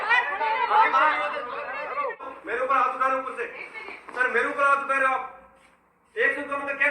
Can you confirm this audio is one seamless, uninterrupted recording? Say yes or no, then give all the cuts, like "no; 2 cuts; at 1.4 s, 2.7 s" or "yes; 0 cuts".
no; 1 cut; at 2.3 s